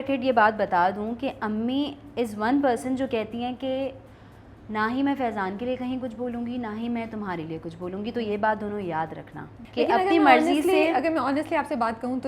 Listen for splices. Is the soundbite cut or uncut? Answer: uncut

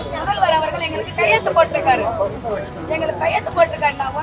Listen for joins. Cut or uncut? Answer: uncut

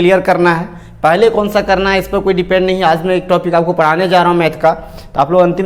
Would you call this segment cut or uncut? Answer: uncut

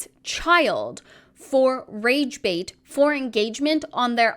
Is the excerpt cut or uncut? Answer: uncut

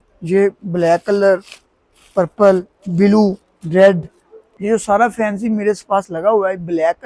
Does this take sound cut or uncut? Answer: cut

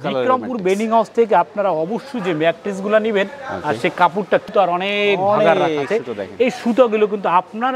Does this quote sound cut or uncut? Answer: cut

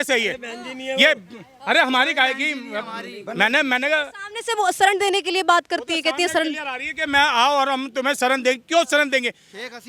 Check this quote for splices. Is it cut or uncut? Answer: uncut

